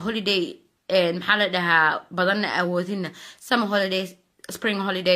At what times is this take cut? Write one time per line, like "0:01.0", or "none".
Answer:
0:03.7